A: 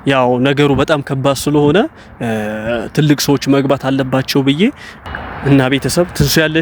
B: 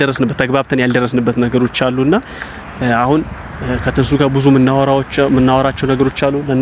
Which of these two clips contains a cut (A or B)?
A